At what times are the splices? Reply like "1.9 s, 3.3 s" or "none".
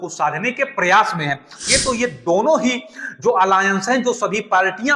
1.6 s